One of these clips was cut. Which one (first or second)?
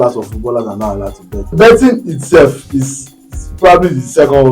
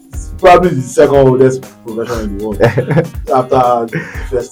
first